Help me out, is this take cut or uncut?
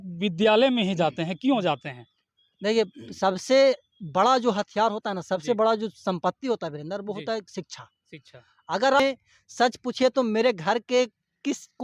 cut